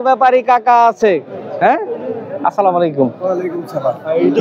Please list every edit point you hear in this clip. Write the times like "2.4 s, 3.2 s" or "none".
none